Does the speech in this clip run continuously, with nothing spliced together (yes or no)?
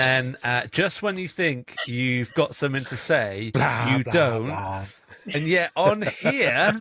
yes